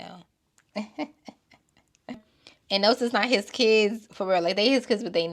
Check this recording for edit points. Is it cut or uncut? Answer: cut